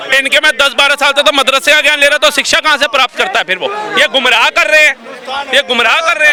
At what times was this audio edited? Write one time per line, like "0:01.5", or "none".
none